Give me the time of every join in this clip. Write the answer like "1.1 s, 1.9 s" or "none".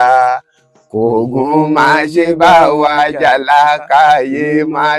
none